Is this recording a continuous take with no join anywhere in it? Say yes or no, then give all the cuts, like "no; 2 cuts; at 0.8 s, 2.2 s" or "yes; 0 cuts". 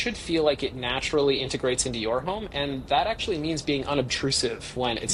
yes; 0 cuts